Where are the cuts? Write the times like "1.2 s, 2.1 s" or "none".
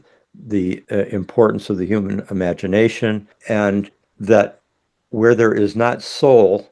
3.3 s, 4.0 s